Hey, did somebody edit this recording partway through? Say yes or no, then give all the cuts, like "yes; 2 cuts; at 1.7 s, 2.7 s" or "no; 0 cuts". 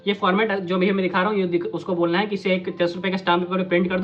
no; 0 cuts